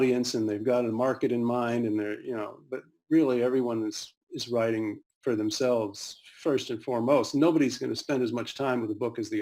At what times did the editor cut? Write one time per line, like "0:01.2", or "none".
none